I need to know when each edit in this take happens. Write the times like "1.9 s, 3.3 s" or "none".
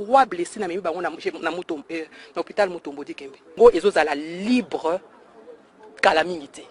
3.5 s